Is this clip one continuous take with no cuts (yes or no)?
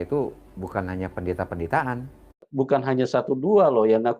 no